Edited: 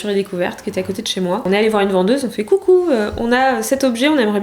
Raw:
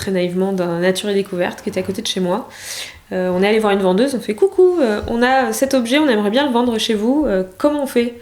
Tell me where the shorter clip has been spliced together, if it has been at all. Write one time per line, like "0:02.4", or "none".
0:01.4